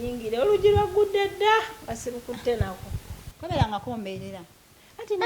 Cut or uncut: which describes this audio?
cut